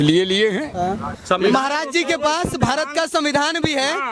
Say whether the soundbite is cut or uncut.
cut